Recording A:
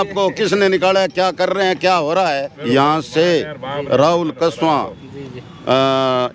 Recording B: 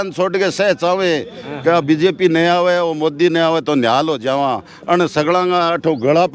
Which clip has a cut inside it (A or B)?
A